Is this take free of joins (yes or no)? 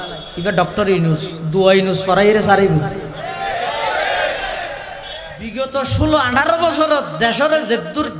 no